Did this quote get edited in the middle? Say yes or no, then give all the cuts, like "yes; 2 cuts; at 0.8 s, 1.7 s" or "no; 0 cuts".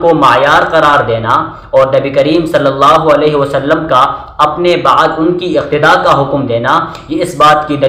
no; 0 cuts